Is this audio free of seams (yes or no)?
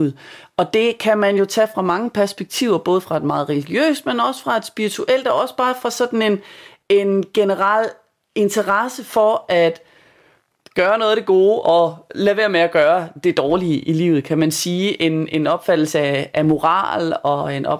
yes